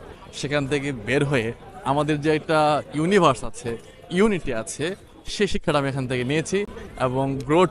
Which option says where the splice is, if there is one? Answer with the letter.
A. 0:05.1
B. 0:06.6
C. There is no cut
C